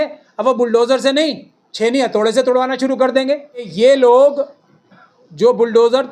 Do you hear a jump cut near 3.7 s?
yes; 1 cut; at 3.7 s

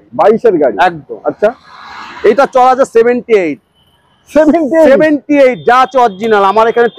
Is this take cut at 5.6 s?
no; 0 cuts

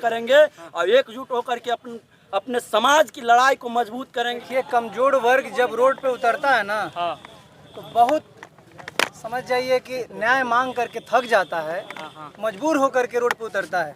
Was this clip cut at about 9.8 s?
no; 1 cut; at 4.3 s

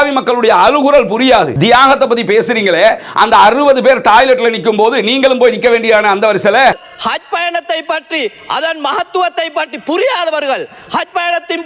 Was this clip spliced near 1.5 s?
yes; 2 cuts; at 1.5 s, 6.7 s

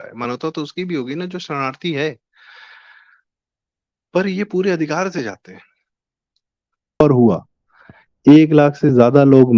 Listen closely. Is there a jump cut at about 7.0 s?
yes; 1 cut; at 7.0 s

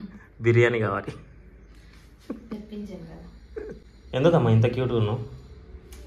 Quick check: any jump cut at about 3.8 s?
yes; 1 cut; at 3.8 s

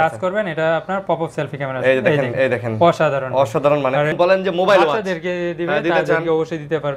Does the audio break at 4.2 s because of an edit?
yes; 1 cut; at 4.2 s

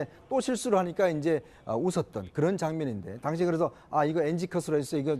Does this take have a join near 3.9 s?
no; 1 cut; at 2.1 s

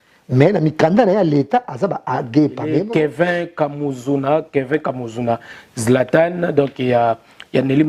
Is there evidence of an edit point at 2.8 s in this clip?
yes; 1 cut; at 2.8 s

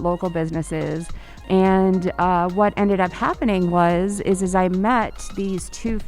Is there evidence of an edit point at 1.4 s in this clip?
yes; 1 cut; at 1.4 s

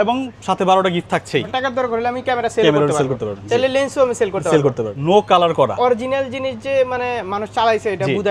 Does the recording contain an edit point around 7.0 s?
no; 2 cuts; at 1.5 s, 4.9 s

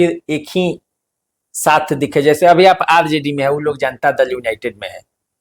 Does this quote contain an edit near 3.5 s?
no; 0 cuts

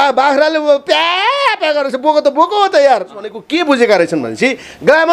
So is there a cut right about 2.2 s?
no; 1 cut; at 3.4 s

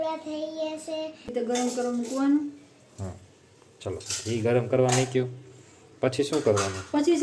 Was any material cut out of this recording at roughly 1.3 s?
yes; 1 cut; at 1.3 s

